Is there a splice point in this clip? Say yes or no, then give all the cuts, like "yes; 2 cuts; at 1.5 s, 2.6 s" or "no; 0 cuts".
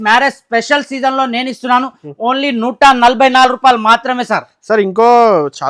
no; 0 cuts